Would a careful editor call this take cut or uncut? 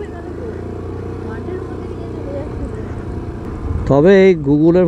cut